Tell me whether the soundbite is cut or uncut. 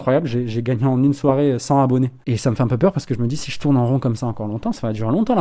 cut